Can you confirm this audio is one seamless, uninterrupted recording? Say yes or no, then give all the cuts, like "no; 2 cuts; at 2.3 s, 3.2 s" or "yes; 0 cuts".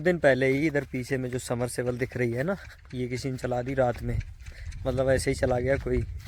yes; 0 cuts